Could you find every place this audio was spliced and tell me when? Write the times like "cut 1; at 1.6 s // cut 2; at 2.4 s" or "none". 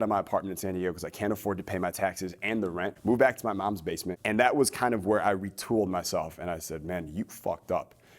cut 1; at 2.9 s // cut 2; at 4.1 s